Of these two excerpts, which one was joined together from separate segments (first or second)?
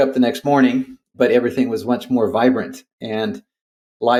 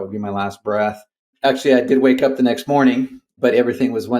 second